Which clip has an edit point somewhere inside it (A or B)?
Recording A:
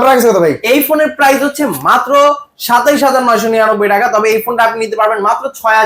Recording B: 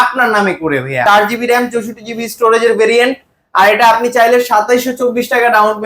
B